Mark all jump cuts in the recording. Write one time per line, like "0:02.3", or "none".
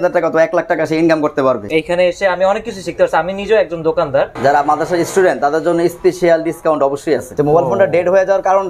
0:01.6
0:04.3
0:07.3